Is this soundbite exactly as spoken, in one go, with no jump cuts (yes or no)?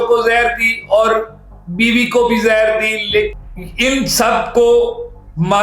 no